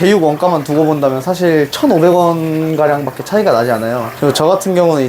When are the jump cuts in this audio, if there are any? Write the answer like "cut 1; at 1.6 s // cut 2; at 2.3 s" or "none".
none